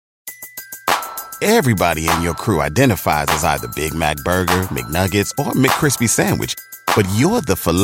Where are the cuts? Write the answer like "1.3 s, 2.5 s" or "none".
none